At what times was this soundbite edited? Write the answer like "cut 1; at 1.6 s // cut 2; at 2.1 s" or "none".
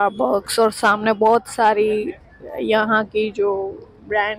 none

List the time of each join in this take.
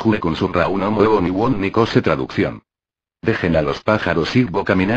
cut 1; at 2.0 s

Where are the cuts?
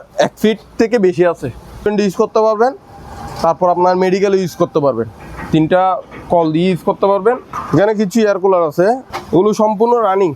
cut 1; at 1.9 s // cut 2; at 7.5 s // cut 3; at 9.1 s

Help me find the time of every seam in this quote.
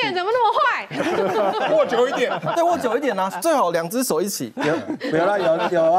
none

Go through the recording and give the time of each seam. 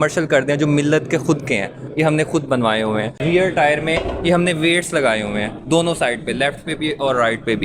cut 1; at 3.2 s

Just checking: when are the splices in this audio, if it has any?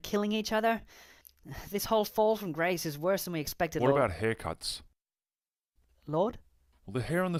none

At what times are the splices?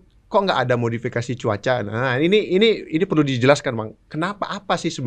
none

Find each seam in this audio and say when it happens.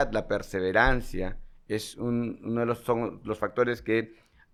none

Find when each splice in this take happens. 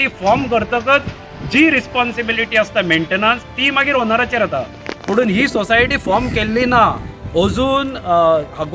none

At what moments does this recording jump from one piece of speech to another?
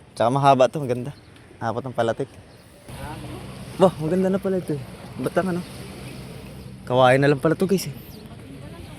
cut 1; at 2.9 s

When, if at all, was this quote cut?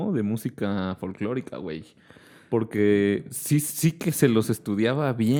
none

